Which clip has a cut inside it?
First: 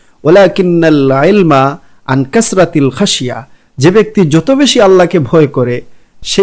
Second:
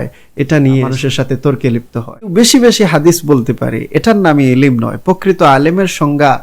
second; 2 cuts; at 0.9 s, 2.3 s

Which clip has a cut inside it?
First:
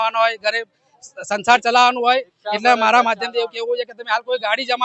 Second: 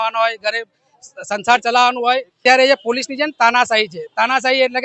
second; 1 cut; at 2.4 s

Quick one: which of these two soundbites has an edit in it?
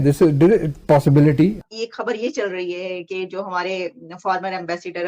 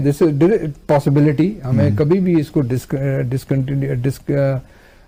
first; 1 cut; at 1.7 s

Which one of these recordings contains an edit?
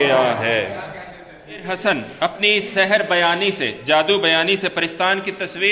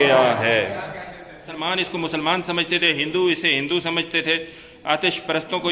second; 1 cut; at 1.6 s

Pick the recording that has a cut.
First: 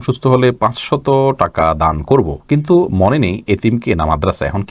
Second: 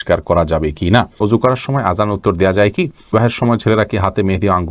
second; 2 cuts; at 1.1 s, 3.1 s

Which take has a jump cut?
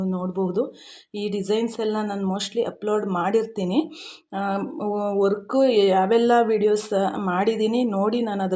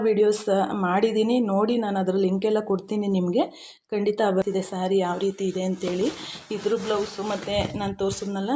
second; 1 cut; at 4.4 s

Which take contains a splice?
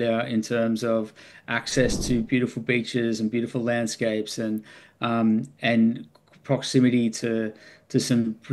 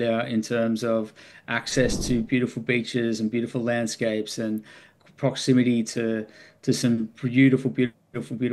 second; 1 cut; at 4.9 s

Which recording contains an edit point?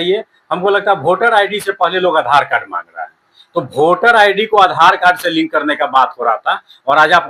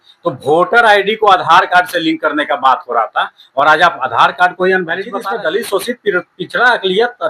second; 1 cut; at 5.2 s

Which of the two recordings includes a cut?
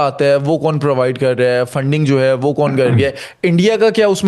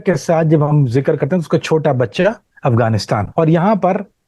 second; 1 cut; at 3.3 s

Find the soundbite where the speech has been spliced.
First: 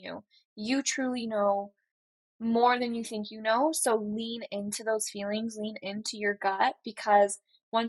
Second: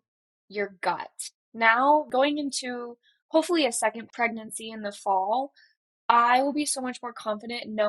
second; 2 cuts; at 2.1 s, 4.1 s

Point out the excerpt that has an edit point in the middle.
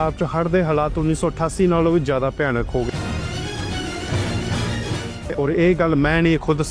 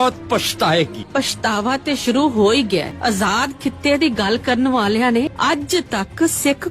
second; 3 cuts; at 1.0 s, 2.9 s, 5.3 s

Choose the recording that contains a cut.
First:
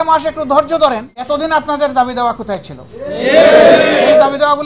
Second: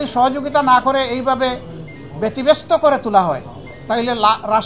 first; 1 cut; at 1.2 s

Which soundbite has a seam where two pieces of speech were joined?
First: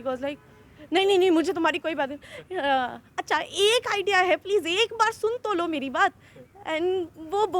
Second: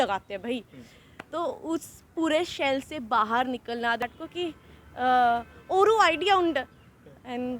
second; 1 cut; at 4.0 s

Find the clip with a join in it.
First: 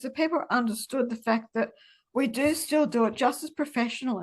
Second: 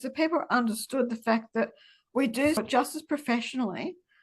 second; 1 cut; at 2.6 s

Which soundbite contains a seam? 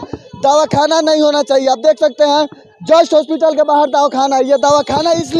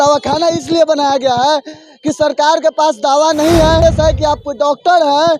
second; 1 cut; at 3.8 s

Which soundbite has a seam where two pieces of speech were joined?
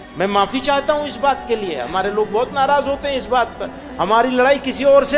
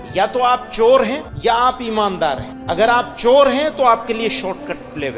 second; 2 cuts; at 1.3 s, 2.5 s

